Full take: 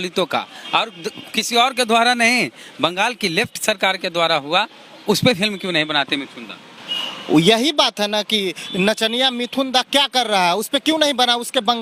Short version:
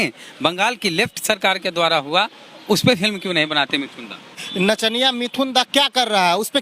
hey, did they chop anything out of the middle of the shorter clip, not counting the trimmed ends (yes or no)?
yes